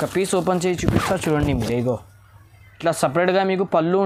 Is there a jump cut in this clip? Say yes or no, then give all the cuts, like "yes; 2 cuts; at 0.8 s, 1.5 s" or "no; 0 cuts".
no; 0 cuts